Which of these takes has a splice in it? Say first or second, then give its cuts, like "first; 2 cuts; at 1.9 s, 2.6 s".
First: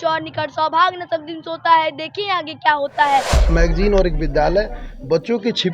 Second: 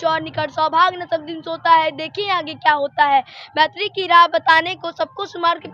first; 1 cut; at 3.5 s